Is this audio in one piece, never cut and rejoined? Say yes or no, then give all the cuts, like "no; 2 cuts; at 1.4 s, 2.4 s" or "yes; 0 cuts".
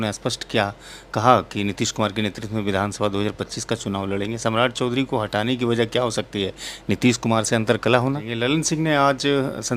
no; 1 cut; at 8.3 s